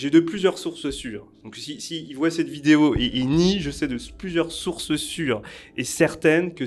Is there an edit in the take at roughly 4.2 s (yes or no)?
no